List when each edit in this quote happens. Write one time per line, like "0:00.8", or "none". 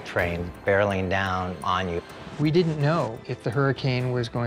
0:02.2
0:03.2